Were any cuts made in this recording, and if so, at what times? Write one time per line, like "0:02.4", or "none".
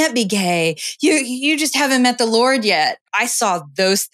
0:03.0